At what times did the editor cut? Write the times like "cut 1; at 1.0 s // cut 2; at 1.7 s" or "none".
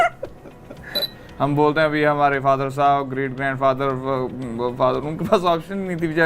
cut 1; at 1.1 s